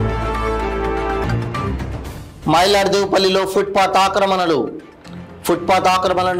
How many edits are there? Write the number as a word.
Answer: one